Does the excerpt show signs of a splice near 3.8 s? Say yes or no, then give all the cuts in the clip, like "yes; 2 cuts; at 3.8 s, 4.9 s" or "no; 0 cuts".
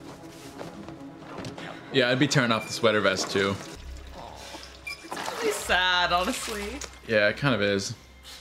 yes; 1 cut; at 3.8 s